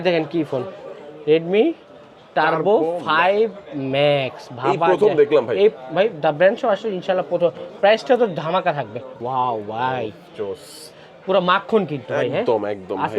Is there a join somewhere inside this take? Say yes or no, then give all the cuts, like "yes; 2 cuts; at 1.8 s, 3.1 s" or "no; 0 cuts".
yes; 1 cut; at 9.1 s